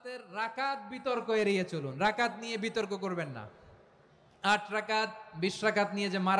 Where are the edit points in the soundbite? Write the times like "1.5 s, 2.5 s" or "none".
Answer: none